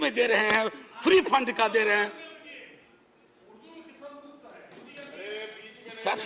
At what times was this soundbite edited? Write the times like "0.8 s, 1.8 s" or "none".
none